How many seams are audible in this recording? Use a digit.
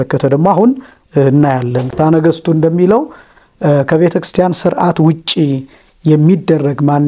1